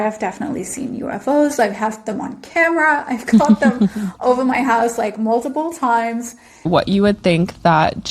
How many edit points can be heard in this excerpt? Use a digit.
1